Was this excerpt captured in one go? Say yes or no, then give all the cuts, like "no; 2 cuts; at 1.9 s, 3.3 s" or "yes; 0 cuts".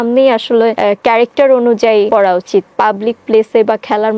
no; 2 cuts; at 0.8 s, 2.1 s